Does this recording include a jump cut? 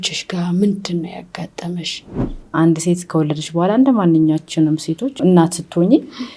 yes; 2 cuts; at 2.4 s, 5.2 s

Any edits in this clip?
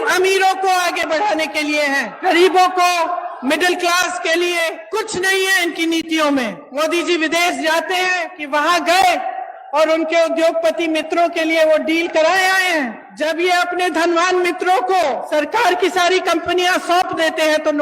yes; 6 cuts; at 2.1 s, 4.8 s, 6.6 s, 8.3 s, 13.1 s, 15.2 s

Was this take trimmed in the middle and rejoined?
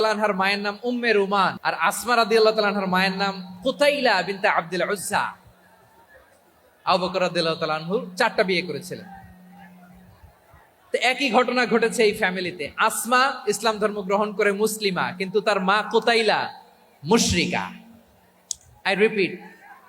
yes; 1 cut; at 1.6 s

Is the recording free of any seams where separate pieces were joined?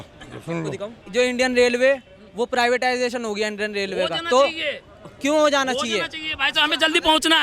no; 1 cut; at 1.0 s

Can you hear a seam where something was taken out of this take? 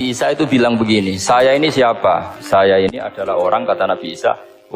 no; 0 cuts

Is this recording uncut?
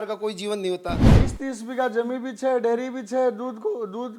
no; 1 cut; at 1.0 s

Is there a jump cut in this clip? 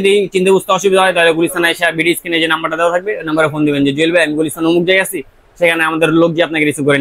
no; 0 cuts

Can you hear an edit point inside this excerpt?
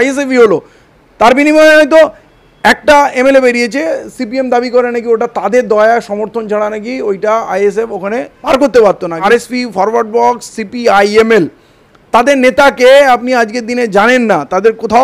yes; 2 cuts; at 8.3 s, 9.2 s

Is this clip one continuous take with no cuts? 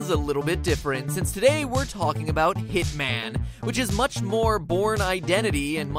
yes; 0 cuts

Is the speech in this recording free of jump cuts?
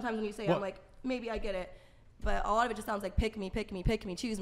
yes; 0 cuts

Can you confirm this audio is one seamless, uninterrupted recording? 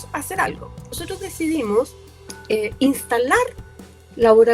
no; 1 cut; at 1.1 s

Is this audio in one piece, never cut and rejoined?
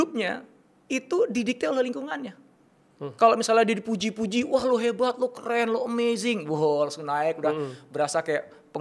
yes; 0 cuts

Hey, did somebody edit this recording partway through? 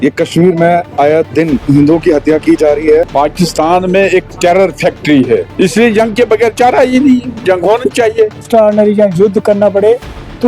yes; 4 cuts; at 1.6 s, 3.1 s, 5.5 s, 8.4 s

